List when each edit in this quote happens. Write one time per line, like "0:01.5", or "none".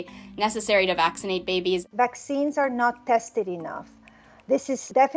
0:01.9